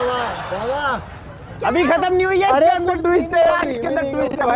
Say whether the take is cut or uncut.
uncut